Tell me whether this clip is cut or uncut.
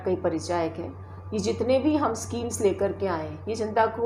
uncut